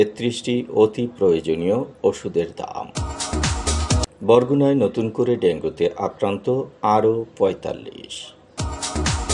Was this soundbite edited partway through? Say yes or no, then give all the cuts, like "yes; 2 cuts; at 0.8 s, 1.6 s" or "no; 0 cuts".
no; 0 cuts